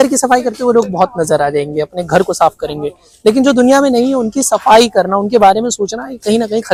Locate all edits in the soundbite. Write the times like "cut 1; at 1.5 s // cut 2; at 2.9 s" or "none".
none